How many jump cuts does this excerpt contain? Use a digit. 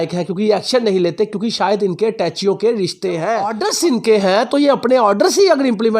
1